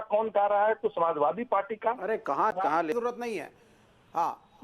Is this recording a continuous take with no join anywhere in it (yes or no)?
yes